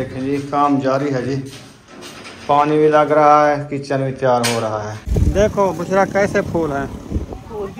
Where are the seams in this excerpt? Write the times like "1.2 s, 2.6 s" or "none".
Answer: 5.0 s

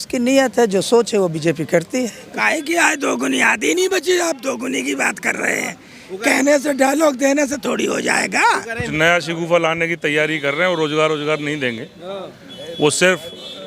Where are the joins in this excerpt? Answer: 2.3 s, 8.8 s

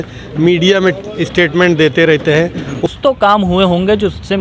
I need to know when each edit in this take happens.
2.9 s

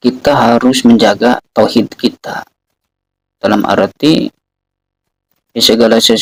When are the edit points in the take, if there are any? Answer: none

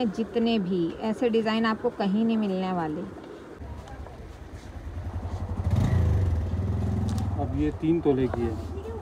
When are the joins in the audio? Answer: 3.5 s

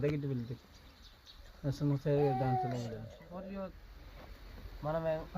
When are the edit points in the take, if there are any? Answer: 3.2 s

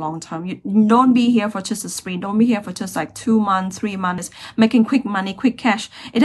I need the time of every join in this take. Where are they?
4.3 s

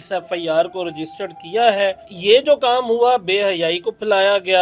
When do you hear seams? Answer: 2.1 s

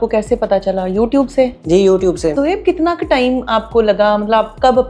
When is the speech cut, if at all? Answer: 2.3 s

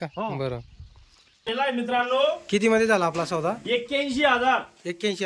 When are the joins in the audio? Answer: 1.5 s

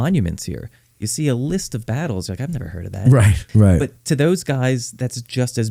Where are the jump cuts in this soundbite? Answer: 3.5 s

